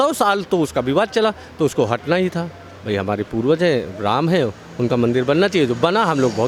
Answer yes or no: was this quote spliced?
no